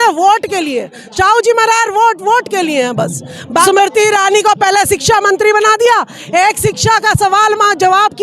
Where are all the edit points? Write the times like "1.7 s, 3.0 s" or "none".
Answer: 3.6 s